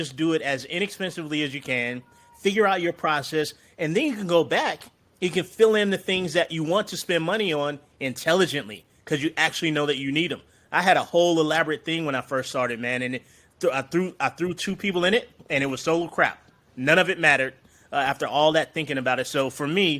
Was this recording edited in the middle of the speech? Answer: no; 0 cuts

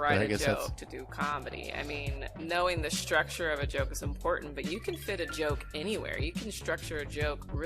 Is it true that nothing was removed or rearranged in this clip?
no; 1 cut; at 2.3 s

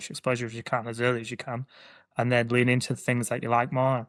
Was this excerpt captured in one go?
yes; 0 cuts

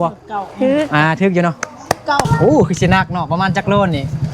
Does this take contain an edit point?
yes; 1 cut; at 2.3 s

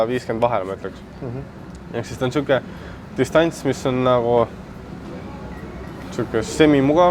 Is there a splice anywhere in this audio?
no; 0 cuts

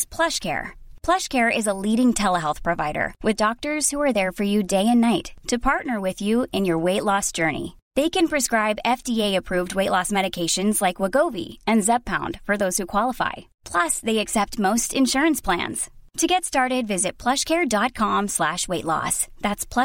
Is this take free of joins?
yes; 0 cuts

